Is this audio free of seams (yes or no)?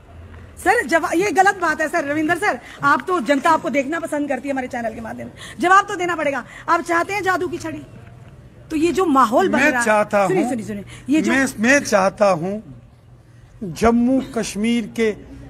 yes